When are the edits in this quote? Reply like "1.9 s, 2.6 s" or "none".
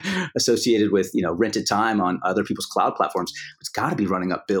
3.6 s

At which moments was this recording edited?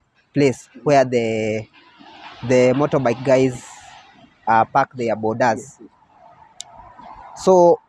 none

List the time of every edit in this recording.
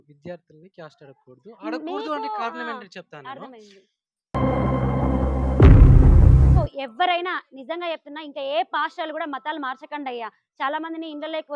6.6 s

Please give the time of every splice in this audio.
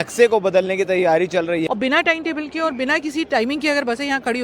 1.7 s

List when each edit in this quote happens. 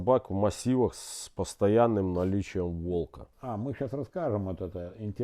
3.2 s

